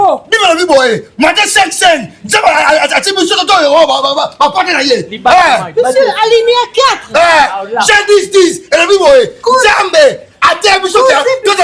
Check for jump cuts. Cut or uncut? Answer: uncut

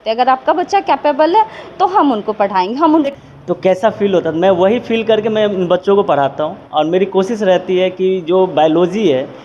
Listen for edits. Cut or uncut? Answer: cut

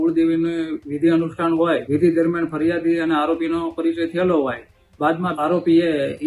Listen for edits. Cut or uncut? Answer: cut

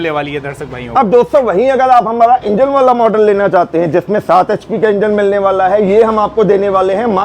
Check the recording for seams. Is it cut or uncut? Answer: uncut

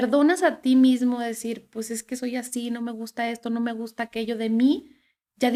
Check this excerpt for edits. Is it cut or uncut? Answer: uncut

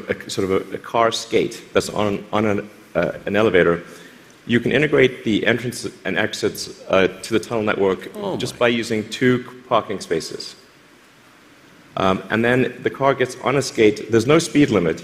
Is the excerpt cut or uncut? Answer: uncut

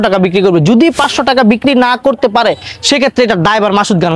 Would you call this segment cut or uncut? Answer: uncut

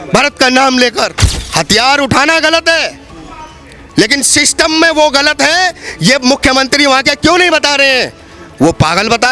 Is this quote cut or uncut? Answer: cut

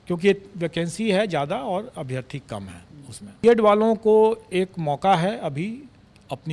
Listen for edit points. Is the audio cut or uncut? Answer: cut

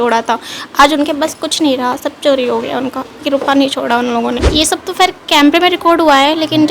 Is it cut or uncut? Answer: cut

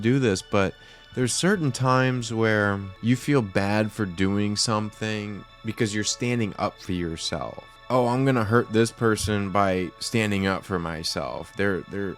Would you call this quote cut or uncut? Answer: cut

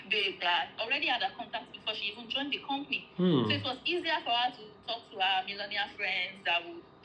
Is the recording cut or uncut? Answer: uncut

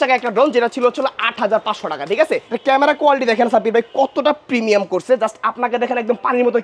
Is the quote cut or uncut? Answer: cut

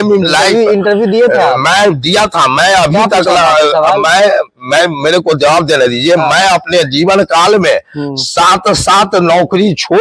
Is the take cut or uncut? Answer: uncut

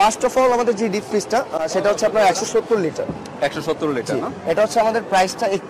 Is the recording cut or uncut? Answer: uncut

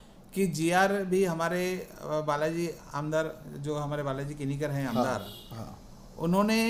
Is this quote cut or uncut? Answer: uncut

